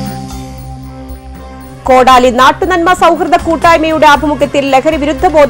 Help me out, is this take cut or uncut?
uncut